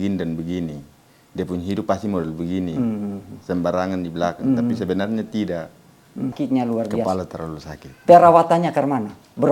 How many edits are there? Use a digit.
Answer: 1